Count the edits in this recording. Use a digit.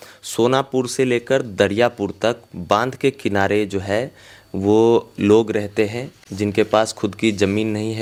0